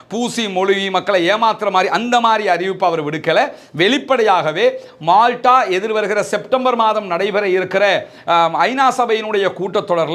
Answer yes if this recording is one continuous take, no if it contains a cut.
yes